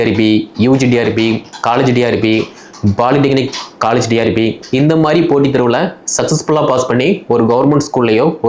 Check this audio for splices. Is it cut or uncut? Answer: uncut